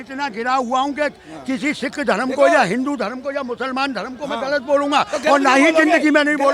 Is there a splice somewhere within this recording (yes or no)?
no